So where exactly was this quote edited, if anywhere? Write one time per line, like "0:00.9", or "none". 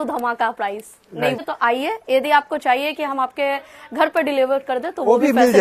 0:01.4